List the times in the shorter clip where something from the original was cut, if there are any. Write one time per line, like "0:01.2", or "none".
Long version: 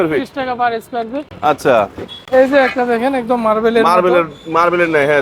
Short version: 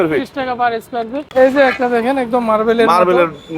0:01.2